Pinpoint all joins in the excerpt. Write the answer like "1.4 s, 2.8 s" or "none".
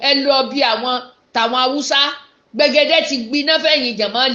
none